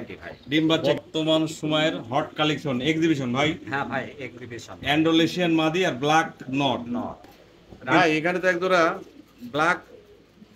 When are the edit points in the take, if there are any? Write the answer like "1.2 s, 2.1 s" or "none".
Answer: 0.8 s, 8.0 s